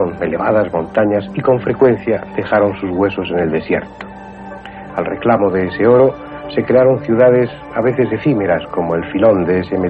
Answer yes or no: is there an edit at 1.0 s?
no